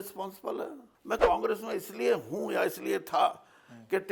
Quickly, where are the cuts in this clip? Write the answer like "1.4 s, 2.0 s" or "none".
1.1 s